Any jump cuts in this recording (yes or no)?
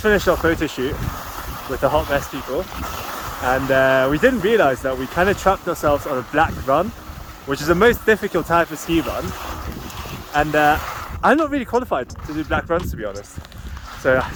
no